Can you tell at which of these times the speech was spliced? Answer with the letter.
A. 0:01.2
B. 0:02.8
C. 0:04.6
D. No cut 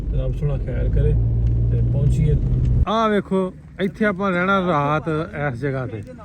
B